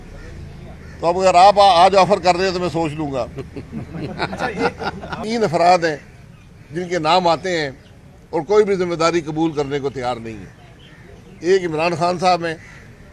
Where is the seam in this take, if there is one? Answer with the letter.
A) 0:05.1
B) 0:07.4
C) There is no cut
A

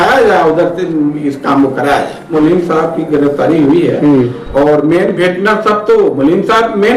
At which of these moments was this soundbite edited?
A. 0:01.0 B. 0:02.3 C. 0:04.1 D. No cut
B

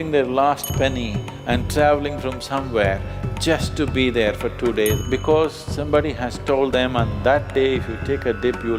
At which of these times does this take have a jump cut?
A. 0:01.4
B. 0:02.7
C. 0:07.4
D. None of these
D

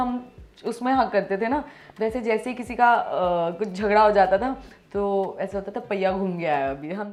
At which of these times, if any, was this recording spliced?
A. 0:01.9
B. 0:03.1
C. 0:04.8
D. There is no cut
D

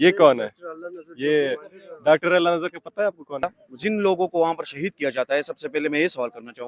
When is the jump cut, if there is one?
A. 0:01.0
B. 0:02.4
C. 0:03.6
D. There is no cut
C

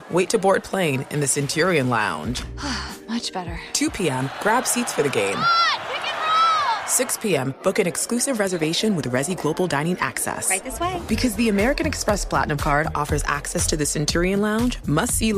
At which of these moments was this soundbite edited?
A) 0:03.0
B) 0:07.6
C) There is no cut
C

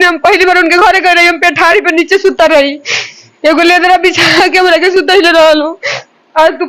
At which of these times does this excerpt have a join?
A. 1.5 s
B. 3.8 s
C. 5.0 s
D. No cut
D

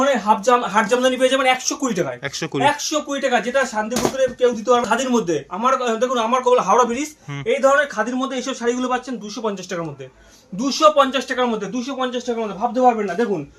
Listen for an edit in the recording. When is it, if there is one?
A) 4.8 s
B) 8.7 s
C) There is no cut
A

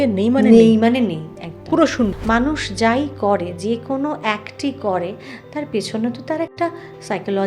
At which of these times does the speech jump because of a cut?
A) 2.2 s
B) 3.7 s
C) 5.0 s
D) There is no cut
A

